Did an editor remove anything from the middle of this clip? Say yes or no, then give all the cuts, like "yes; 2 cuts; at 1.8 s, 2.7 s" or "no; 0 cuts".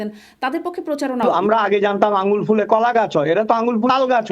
yes; 1 cut; at 1.2 s